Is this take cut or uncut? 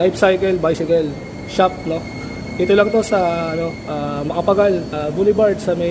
cut